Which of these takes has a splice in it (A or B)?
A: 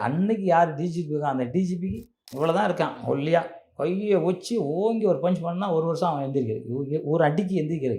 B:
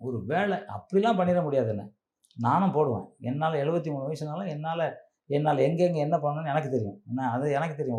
A